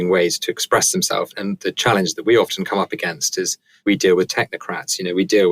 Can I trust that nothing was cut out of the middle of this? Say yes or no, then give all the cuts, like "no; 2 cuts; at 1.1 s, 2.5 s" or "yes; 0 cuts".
no; 2 cuts; at 1.3 s, 3.6 s